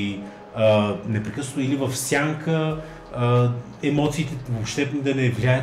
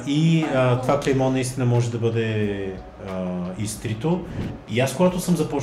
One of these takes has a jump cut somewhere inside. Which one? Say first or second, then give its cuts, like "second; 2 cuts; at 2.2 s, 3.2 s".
second; 1 cut; at 4.5 s